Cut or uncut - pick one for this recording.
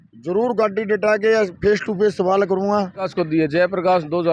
cut